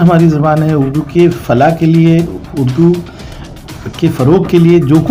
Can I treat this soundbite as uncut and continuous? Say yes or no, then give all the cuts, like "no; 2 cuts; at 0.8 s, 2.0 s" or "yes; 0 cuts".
yes; 0 cuts